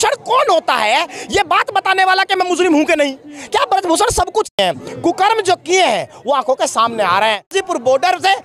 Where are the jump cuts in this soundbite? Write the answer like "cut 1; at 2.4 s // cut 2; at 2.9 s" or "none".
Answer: cut 1; at 4.5 s // cut 2; at 7.5 s